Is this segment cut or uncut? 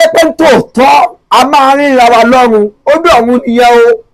uncut